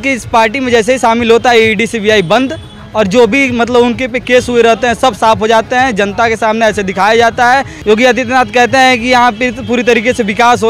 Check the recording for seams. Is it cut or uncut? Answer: cut